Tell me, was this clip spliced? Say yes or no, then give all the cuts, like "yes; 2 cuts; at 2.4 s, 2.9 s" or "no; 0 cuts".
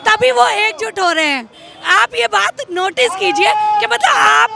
no; 0 cuts